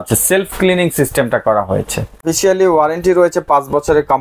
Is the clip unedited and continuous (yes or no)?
no